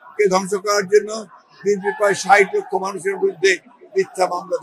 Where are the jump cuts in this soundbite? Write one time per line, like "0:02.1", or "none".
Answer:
none